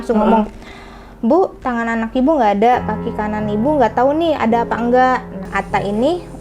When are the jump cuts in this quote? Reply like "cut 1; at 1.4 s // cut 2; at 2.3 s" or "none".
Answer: cut 1; at 5.5 s